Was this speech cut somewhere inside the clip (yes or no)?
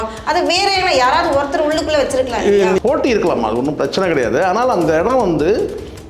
yes